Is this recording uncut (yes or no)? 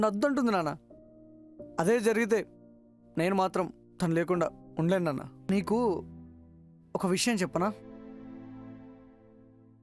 no